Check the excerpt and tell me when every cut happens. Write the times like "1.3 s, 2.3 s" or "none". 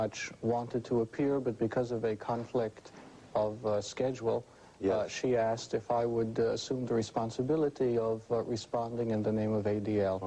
4.6 s

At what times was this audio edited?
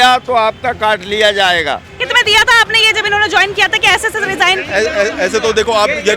2.0 s

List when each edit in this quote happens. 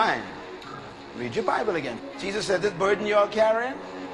2.0 s

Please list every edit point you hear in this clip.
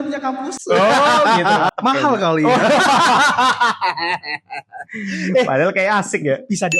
1.7 s

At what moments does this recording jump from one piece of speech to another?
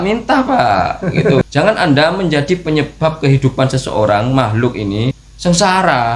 1.4 s, 5.2 s

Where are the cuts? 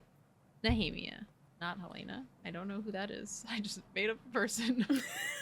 1.4 s

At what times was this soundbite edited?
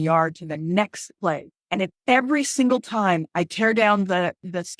1.5 s

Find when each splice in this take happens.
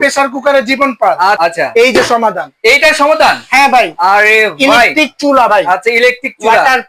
1.4 s

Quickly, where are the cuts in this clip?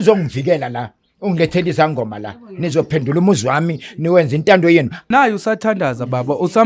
5.1 s

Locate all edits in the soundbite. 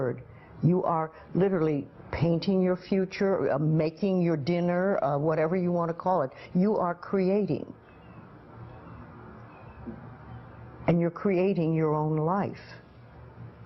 6.0 s

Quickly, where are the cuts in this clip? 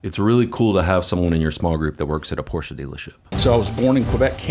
3.3 s

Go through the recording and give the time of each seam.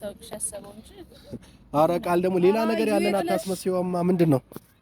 none

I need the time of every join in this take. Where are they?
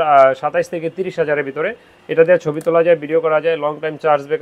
none

